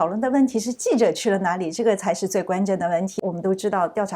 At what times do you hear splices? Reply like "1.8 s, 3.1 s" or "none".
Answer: 3.2 s